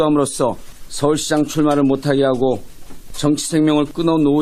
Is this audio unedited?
yes; 0 cuts

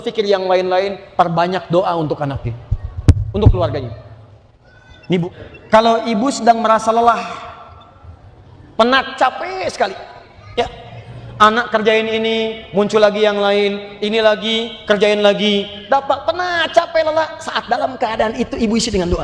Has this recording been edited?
yes; 1 cut; at 5.4 s

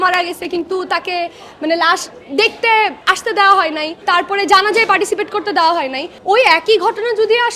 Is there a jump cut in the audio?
yes; 3 cuts; at 3.0 s, 3.9 s, 6.1 s

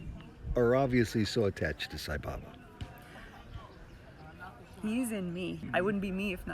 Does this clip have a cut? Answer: yes; 1 cut; at 5.6 s

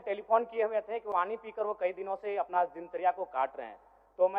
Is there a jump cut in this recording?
yes; 1 cut; at 1.1 s

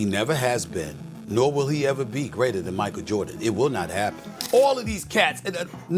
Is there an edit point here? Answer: yes; 1 cut; at 4.3 s

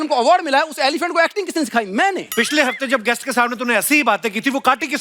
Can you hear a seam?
yes; 1 cut; at 2.3 s

